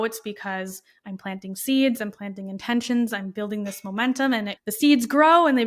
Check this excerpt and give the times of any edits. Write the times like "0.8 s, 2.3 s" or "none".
4.6 s